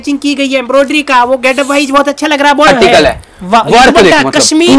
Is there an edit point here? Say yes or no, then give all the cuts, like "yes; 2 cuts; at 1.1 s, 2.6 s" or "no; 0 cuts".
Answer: yes; 1 cut; at 2.7 s